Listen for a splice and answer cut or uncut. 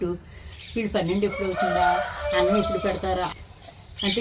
cut